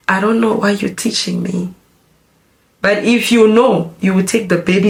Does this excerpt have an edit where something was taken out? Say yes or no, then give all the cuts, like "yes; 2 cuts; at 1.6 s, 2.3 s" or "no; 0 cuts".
no; 0 cuts